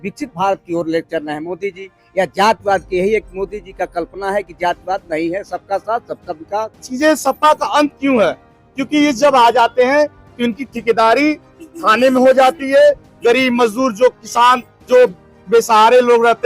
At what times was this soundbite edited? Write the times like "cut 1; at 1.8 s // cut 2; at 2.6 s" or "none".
cut 1; at 6.8 s